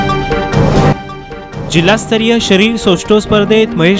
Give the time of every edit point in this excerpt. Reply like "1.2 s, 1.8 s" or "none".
0.9 s